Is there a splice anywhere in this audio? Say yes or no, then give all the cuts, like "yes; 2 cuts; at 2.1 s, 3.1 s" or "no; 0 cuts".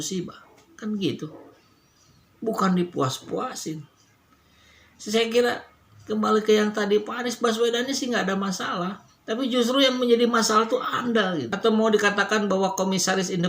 yes; 1 cut; at 11.4 s